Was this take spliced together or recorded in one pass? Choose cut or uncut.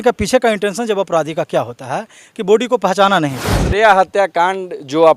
cut